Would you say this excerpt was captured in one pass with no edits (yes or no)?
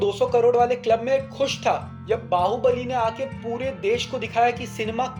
yes